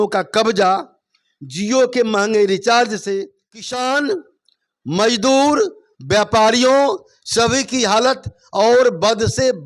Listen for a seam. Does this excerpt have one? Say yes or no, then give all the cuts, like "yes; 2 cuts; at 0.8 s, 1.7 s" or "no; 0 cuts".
yes; 1 cut; at 3.5 s